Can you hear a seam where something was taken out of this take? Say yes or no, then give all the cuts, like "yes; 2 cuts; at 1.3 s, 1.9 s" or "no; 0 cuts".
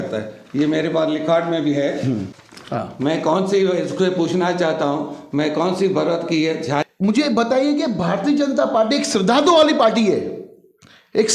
yes; 2 cuts; at 2.3 s, 6.8 s